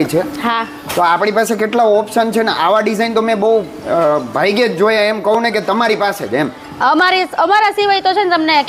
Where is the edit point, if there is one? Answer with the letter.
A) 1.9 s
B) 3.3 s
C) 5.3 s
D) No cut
D